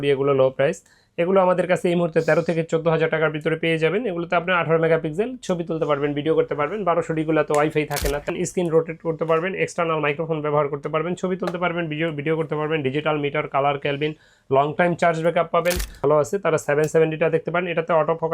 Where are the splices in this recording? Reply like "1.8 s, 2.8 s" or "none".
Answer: 8.3 s, 15.9 s